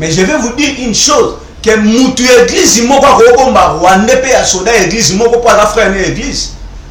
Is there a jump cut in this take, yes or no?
no